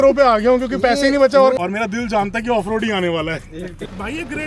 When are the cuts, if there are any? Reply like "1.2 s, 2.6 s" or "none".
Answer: 1.5 s, 3.5 s